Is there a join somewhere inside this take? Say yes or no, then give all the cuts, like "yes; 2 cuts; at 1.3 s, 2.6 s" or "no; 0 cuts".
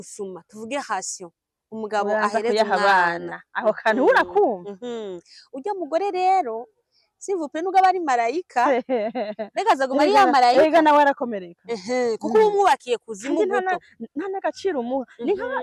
no; 0 cuts